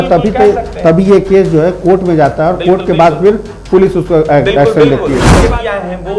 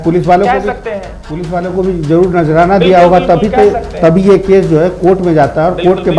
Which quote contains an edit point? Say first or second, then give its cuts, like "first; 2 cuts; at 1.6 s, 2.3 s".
first; 1 cut; at 5.3 s